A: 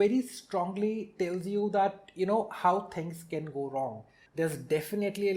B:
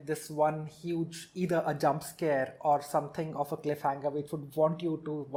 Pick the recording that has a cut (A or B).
A